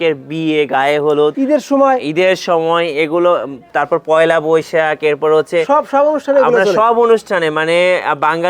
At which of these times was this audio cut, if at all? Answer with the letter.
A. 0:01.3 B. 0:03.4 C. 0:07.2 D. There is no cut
A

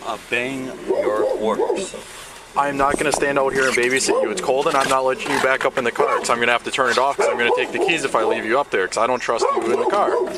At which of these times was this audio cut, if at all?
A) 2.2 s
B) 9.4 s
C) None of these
C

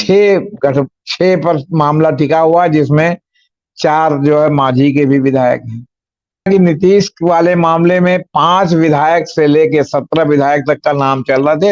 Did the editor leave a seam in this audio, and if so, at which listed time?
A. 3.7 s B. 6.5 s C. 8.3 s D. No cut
B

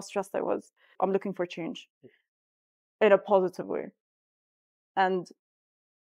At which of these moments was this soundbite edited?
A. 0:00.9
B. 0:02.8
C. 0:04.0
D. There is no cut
A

